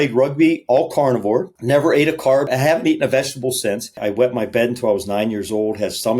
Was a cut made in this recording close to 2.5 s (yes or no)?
yes